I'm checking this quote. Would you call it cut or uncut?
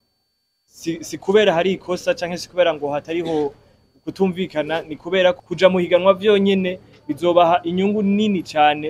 cut